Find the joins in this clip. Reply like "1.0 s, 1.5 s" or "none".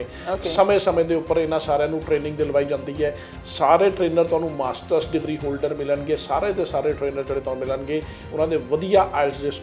none